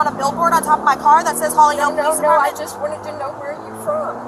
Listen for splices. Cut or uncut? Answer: uncut